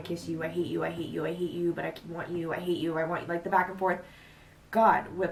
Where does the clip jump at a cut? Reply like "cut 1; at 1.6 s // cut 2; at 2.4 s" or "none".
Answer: none